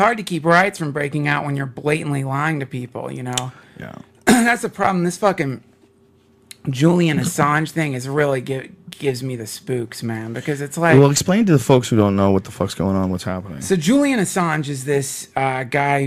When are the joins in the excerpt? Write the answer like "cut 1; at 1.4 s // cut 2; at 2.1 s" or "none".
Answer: cut 1; at 13.2 s